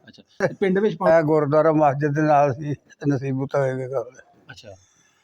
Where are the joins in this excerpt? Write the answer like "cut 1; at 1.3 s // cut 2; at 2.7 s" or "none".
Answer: cut 1; at 1.1 s